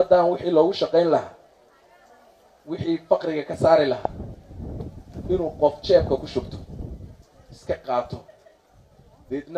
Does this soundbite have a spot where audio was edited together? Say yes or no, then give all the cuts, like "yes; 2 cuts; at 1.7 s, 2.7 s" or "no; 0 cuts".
no; 0 cuts